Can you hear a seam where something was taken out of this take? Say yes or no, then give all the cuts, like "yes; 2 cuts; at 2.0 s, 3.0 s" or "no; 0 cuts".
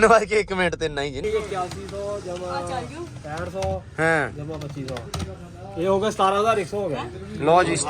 yes; 1 cut; at 1.2 s